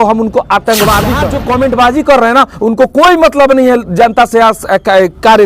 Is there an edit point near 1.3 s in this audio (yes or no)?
yes